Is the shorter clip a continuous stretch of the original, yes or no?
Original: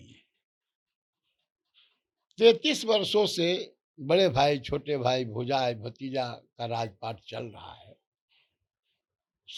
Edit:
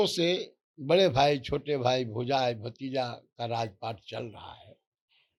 yes